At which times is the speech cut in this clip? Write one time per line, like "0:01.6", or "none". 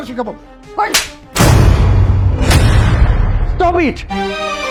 none